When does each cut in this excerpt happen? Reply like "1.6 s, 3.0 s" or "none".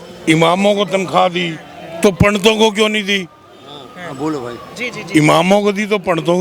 none